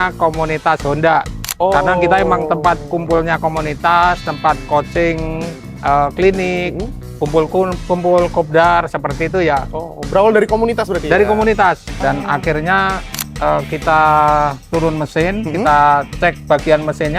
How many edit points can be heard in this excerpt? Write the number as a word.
one